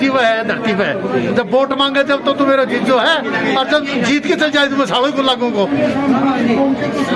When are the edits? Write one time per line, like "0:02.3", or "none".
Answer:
none